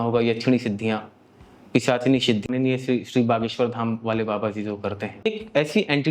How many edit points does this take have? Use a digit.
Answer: 2